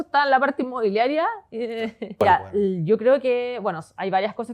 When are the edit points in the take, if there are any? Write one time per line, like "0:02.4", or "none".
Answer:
0:02.2